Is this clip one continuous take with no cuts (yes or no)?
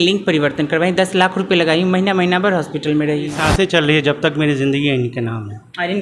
no